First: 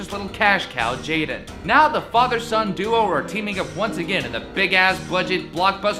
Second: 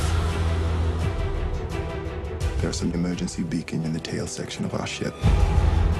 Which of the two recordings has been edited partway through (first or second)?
second